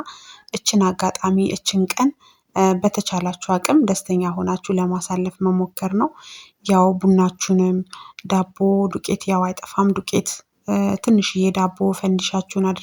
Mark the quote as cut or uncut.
uncut